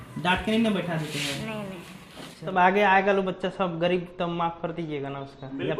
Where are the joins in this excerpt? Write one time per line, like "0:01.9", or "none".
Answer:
0:02.5